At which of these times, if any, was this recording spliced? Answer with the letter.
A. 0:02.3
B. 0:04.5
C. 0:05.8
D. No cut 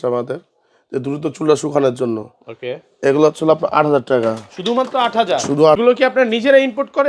C